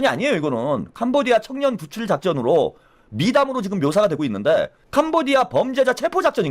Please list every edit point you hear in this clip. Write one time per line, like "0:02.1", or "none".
0:04.8